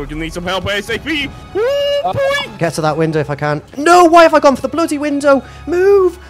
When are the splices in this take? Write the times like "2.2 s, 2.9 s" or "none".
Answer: 2.5 s